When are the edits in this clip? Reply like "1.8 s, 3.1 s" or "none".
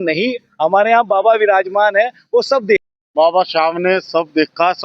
2.8 s